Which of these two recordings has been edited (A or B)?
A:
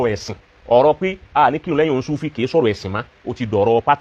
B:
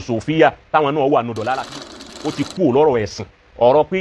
B